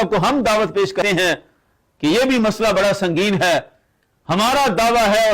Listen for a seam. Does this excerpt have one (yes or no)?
yes